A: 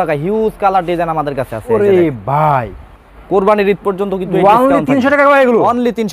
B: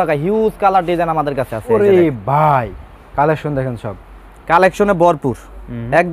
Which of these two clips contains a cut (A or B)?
A